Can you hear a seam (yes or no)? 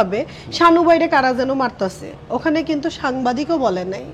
no